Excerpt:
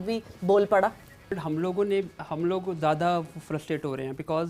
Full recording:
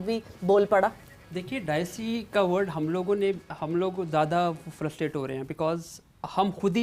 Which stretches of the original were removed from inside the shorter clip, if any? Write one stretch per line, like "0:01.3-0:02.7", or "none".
0:01.3-0:02.6